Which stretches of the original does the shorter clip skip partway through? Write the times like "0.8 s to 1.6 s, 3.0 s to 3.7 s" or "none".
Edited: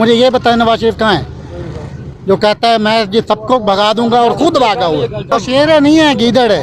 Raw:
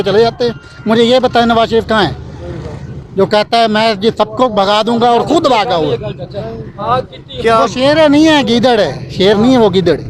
6.2 s to 7.6 s

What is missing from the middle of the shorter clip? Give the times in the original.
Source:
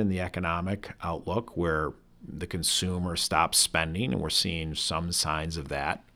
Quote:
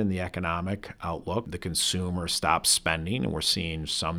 1.5 s to 2.4 s

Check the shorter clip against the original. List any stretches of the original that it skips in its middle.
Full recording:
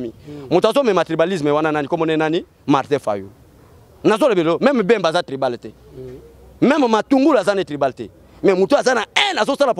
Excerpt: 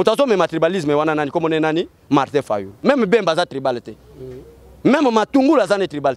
3.4 s to 4.6 s

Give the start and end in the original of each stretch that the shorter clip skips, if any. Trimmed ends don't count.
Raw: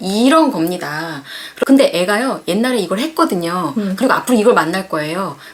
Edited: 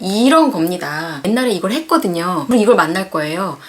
1.2 s to 2.4 s, 3.7 s to 4.2 s

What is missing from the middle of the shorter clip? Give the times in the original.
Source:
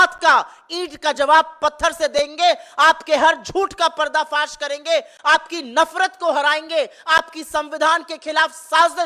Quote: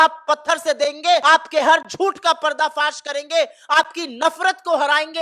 2.6 s to 2.8 s

